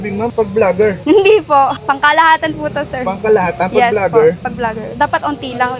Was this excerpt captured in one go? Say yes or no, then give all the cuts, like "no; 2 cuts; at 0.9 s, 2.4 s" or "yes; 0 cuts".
no; 3 cuts; at 1.0 s, 1.8 s, 4.4 s